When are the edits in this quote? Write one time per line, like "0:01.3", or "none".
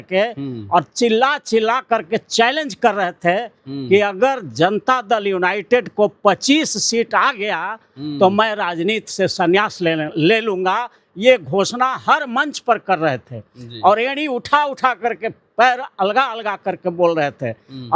none

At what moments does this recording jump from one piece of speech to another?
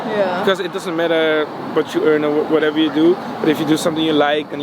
none

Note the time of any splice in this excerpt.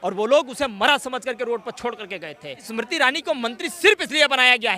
0:02.7

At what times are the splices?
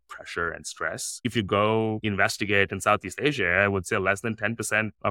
0:01.1
0:02.0

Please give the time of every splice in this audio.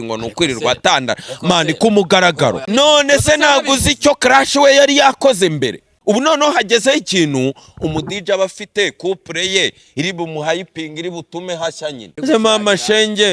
0:02.6
0:05.9
0:12.1

